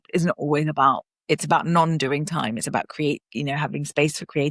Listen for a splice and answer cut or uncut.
cut